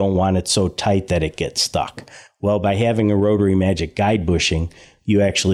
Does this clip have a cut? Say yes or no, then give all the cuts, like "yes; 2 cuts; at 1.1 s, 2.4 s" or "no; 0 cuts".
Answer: no; 0 cuts